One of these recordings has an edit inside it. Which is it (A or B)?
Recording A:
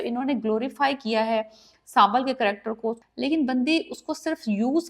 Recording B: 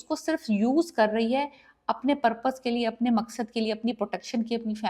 A